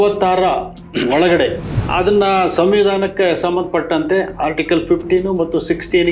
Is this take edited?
yes; 1 cut; at 1.7 s

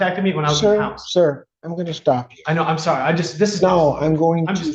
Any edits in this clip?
no; 0 cuts

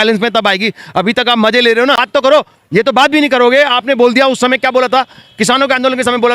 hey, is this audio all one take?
no; 1 cut; at 2.1 s

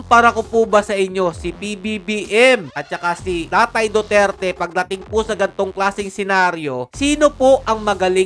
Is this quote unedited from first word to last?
yes; 0 cuts

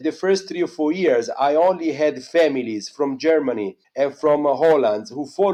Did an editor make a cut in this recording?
no; 0 cuts

